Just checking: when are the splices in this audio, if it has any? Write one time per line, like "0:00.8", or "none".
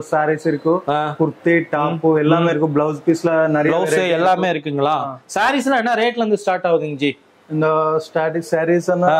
none